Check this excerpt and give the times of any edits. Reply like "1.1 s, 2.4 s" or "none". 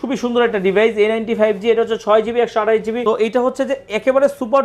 3.0 s